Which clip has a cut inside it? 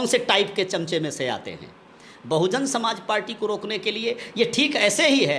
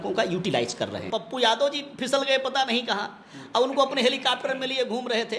second; 1 cut; at 1.1 s

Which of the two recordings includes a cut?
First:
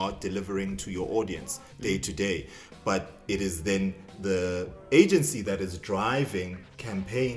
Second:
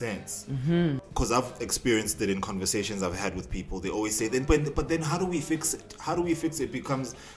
second; 1 cut; at 1.1 s

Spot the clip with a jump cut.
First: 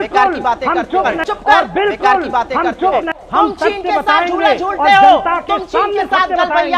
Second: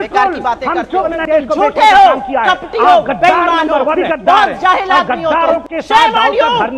second; 2 cuts; at 1.1 s, 4.1 s

